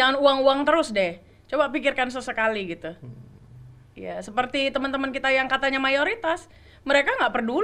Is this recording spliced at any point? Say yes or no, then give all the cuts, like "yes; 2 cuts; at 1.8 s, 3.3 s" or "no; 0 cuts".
no; 0 cuts